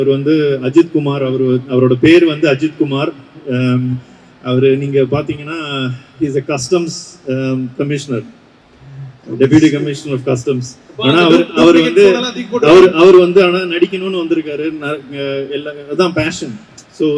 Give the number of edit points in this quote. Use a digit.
0